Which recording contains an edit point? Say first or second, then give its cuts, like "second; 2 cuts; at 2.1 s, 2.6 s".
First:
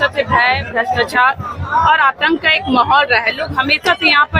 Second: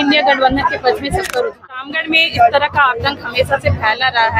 second; 1 cut; at 1.8 s